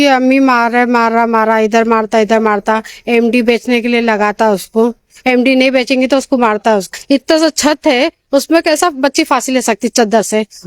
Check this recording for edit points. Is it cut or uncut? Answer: cut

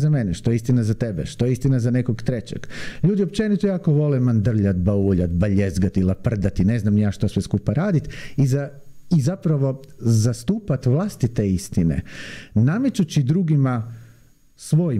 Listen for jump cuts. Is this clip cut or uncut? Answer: uncut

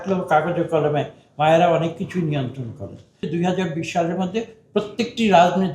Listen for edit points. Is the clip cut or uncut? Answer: cut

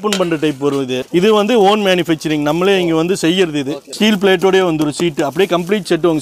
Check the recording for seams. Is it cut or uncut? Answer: cut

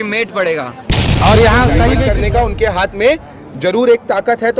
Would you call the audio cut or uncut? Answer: cut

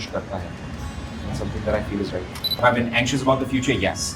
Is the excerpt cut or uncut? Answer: cut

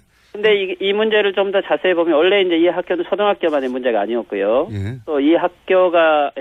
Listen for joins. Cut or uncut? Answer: uncut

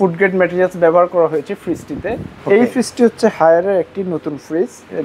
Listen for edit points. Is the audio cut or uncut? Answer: cut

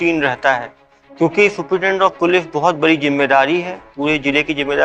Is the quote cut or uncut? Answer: uncut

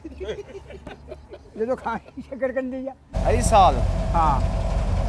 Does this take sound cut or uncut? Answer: cut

